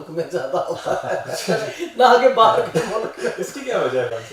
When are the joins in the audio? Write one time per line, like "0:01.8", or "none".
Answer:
none